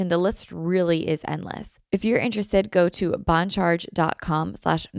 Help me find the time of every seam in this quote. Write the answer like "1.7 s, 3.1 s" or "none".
1.7 s